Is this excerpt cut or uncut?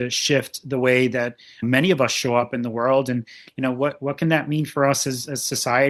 uncut